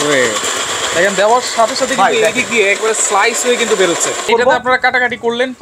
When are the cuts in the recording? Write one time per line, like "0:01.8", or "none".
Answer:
0:04.3